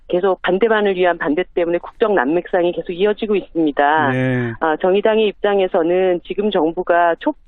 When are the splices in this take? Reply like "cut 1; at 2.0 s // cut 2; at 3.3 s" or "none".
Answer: cut 1; at 1.9 s